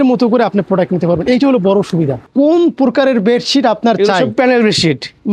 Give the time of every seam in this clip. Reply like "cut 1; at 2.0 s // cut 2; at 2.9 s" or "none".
cut 1; at 2.3 s